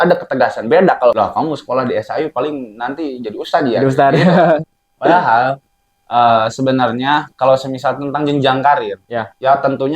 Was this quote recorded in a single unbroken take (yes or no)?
no